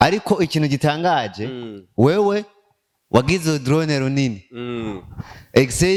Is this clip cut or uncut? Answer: uncut